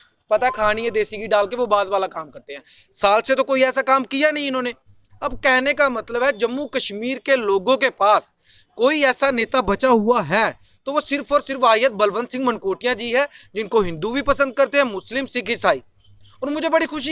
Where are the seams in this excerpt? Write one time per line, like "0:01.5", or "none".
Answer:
none